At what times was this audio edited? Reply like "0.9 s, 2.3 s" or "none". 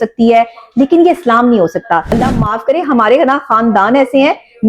2.2 s